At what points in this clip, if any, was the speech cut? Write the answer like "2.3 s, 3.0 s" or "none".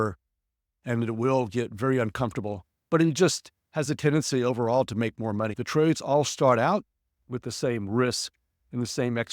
5.5 s